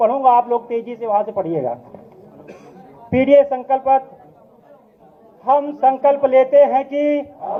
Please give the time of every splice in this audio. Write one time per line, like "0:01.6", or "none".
none